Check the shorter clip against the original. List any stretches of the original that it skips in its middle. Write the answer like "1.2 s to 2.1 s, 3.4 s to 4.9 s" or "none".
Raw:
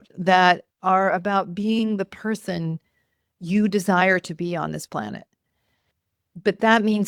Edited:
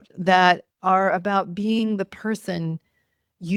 none